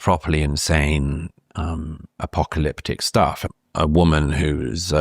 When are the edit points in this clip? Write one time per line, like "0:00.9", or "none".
0:03.5